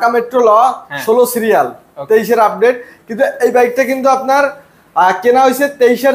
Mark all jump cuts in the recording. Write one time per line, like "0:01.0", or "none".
none